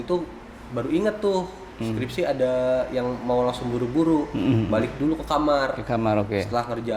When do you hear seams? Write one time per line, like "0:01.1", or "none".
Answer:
none